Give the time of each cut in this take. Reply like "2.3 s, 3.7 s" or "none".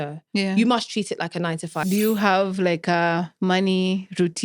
1.9 s